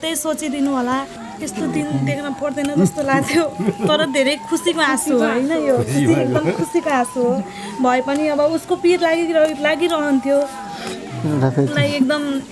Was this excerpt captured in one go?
no; 1 cut; at 1.2 s

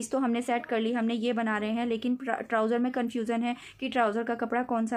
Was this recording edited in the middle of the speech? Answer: no; 0 cuts

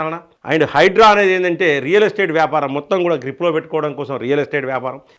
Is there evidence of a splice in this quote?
no; 0 cuts

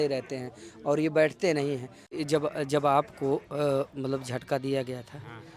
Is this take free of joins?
no; 1 cut; at 2.1 s

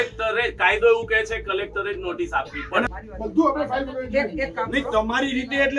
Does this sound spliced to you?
yes; 1 cut; at 2.9 s

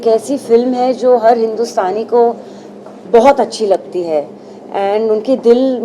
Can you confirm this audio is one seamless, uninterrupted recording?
yes; 0 cuts

